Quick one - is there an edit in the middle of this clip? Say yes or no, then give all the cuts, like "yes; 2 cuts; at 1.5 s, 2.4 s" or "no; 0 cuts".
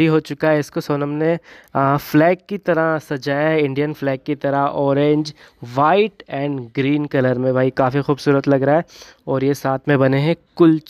no; 0 cuts